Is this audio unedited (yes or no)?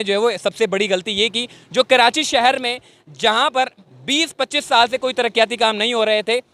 yes